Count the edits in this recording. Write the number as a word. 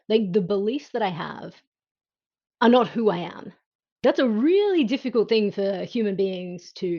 one